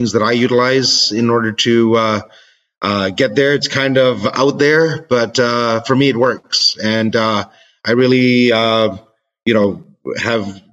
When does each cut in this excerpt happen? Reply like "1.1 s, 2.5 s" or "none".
none

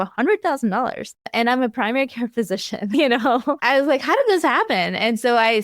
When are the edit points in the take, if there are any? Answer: 3.6 s

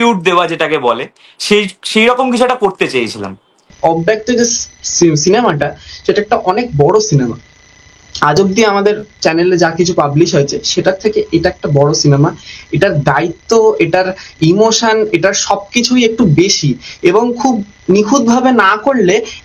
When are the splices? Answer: 3.7 s

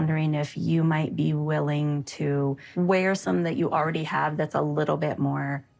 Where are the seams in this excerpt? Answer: 2.7 s

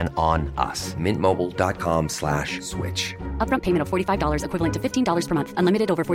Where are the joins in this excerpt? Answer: none

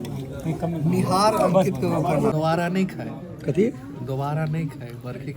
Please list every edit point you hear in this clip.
2.3 s

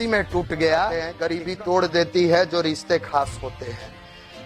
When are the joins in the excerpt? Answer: 1.1 s

